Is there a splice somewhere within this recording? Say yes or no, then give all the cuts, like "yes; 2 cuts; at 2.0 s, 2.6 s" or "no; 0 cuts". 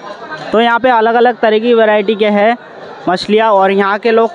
no; 0 cuts